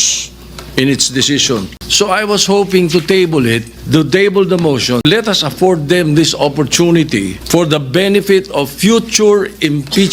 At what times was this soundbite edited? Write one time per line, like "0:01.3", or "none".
0:01.8
0:03.7
0:05.0
0:07.4

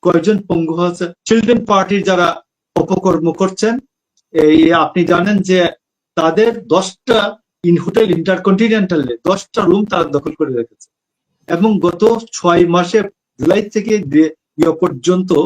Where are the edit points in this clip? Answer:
0:01.1

